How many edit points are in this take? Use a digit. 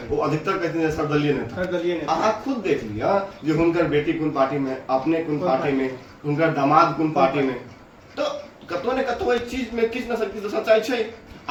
0